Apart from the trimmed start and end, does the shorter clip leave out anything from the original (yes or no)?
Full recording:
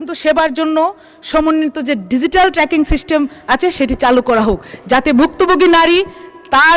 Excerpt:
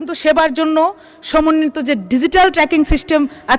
no